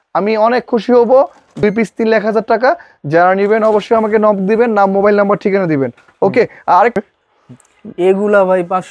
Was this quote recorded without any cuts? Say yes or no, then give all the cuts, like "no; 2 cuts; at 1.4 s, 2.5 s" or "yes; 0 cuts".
no; 2 cuts; at 1.6 s, 7.0 s